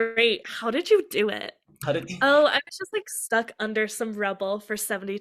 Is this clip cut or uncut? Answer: uncut